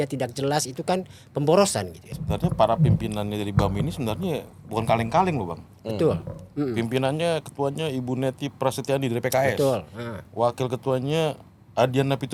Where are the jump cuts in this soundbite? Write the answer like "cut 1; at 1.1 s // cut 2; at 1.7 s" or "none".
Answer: cut 1; at 2.0 s

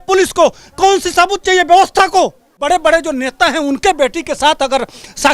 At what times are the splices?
cut 1; at 2.7 s

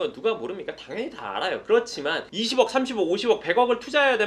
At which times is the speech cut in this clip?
cut 1; at 2.3 s

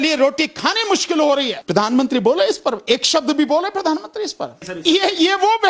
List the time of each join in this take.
cut 1; at 1.6 s // cut 2; at 4.7 s

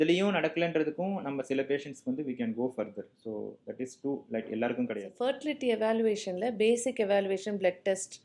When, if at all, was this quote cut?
cut 1; at 5.1 s

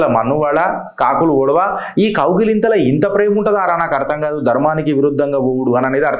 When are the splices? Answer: none

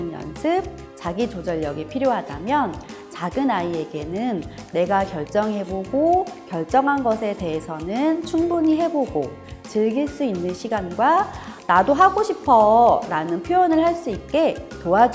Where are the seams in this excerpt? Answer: none

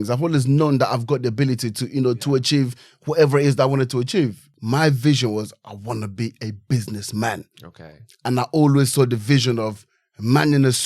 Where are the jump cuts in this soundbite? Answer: cut 1; at 4.5 s

